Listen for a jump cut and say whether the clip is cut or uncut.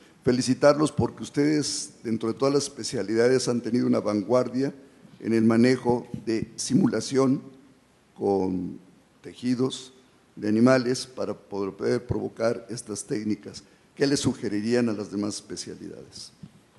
cut